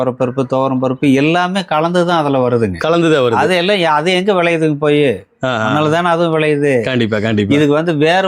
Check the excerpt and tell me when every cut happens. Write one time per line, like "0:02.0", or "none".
none

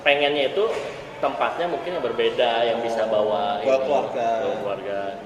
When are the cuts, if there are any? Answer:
none

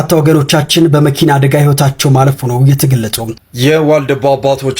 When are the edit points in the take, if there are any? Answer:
0:03.4

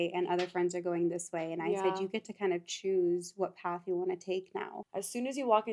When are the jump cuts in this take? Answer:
0:04.7

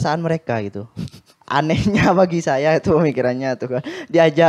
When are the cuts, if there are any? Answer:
none

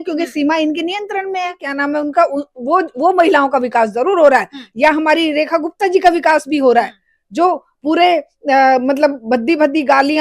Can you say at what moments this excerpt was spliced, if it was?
0:01.7

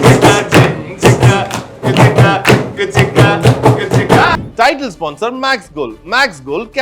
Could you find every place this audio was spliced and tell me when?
0:04.3

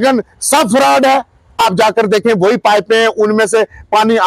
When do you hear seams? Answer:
0:01.6

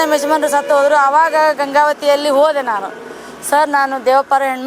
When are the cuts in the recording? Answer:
none

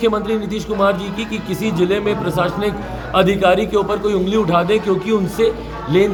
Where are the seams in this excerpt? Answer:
none

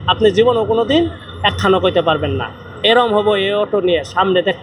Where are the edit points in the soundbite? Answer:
none

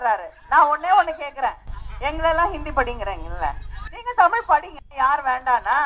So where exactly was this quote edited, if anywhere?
none

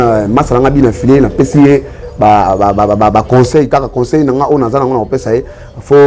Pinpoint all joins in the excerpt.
none

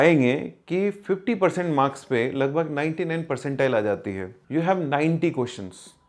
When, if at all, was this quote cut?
0:04.3

